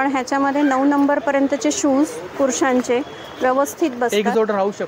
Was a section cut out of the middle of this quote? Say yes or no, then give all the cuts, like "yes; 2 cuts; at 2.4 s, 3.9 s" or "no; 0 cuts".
no; 0 cuts